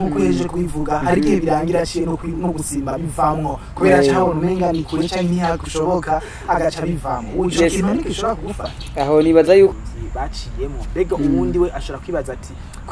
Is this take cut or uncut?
cut